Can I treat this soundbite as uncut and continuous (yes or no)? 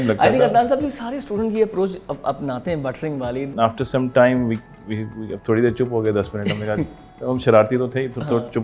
no